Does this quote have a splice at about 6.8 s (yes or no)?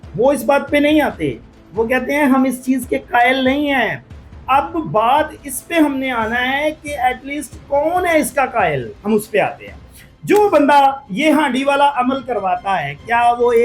no